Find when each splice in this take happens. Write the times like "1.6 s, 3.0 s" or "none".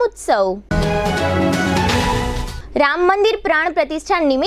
none